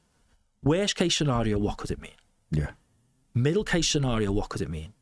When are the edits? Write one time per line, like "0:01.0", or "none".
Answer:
none